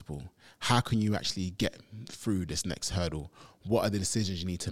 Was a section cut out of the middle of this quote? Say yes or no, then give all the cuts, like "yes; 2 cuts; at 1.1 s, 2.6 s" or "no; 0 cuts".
no; 0 cuts